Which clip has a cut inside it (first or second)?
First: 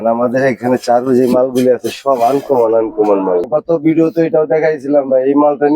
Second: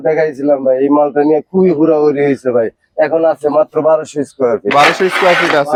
first